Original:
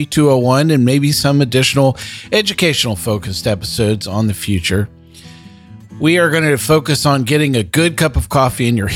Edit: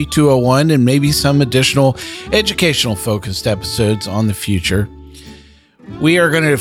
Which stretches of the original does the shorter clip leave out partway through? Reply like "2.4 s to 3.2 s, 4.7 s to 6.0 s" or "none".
none